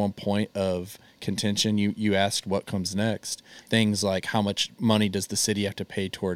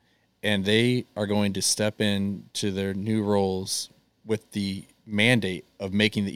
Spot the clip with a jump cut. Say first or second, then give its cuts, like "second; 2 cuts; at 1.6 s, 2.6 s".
first; 1 cut; at 3.6 s